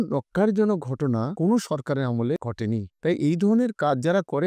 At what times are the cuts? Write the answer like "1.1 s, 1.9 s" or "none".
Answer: 1.3 s, 2.4 s

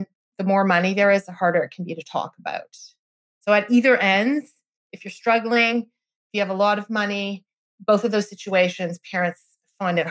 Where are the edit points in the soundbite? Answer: none

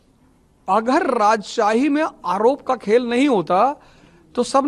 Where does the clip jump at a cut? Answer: none

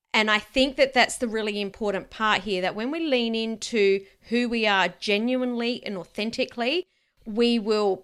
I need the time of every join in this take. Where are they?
none

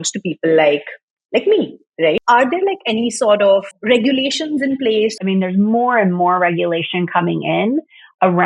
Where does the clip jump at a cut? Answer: 2.2 s, 3.7 s, 5.2 s

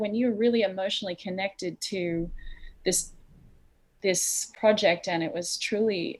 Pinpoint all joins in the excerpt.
none

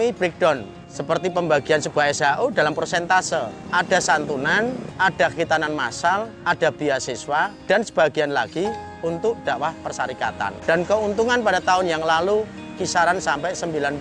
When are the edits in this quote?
3.6 s, 4.9 s, 6.3 s, 7.6 s, 10.6 s

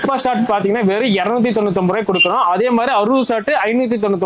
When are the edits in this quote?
none

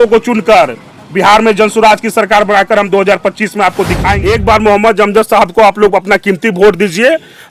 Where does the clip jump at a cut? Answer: 4.2 s

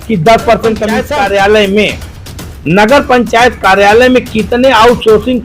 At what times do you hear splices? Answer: 1.0 s

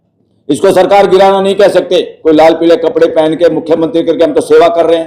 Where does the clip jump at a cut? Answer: 2.1 s

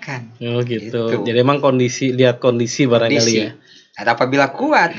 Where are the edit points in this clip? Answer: none

